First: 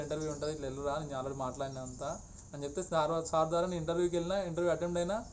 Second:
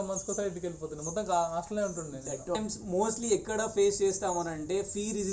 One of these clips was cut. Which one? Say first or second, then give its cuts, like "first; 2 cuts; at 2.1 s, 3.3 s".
second; 1 cut; at 2.6 s